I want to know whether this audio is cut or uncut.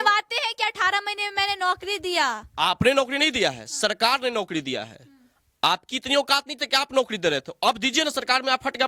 uncut